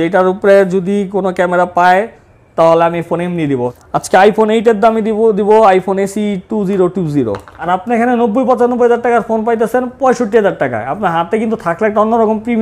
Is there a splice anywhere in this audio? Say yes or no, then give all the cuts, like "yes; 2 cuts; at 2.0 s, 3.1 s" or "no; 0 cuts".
yes; 2 cuts; at 3.7 s, 7.5 s